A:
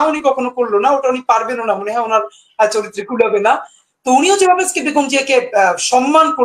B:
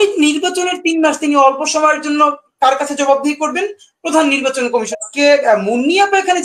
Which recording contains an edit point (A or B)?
B